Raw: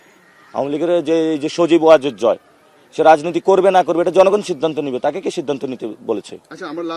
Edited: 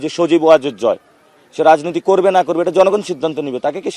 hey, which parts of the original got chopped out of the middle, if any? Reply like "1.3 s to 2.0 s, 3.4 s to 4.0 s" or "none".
none

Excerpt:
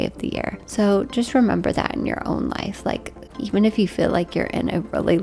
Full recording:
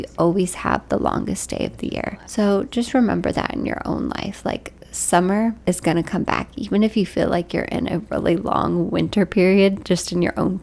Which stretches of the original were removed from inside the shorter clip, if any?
4.9 s to 6.5 s

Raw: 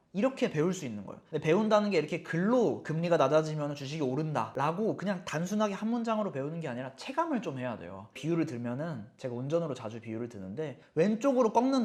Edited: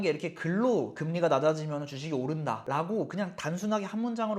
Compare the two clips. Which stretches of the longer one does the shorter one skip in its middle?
none

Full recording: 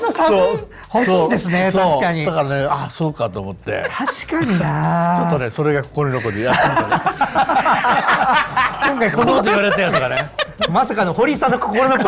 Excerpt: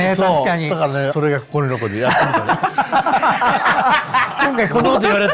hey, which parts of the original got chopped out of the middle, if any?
2.7 s to 5.5 s

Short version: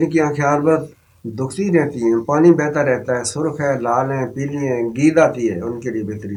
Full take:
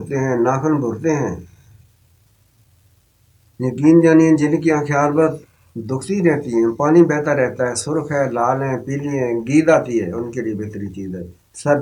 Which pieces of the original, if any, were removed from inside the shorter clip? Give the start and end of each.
none

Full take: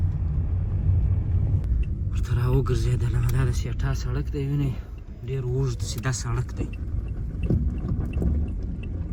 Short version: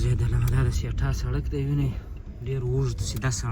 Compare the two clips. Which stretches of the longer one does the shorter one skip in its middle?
none

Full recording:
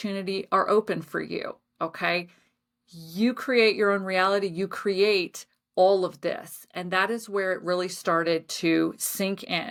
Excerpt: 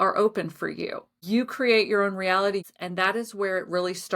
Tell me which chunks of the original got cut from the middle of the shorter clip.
1.6 s to 3.0 s, 4.6 s to 6.6 s

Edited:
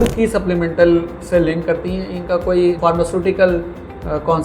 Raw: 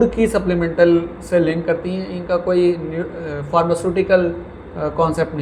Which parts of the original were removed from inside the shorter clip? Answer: 2.8 s to 3.5 s

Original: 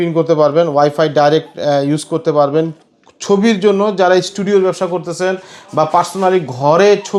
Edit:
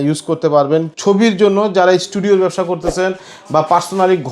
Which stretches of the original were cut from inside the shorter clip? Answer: 2.8 s to 3.2 s

